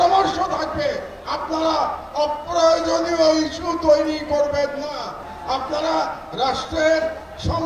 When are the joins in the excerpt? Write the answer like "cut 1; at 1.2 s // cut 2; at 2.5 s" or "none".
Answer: cut 1; at 5.1 s